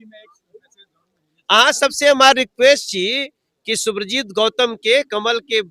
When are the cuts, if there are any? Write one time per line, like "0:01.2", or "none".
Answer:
none